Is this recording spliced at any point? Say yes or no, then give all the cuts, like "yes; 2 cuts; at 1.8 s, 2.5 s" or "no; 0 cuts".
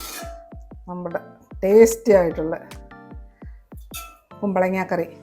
yes; 2 cuts; at 2.6 s, 4.3 s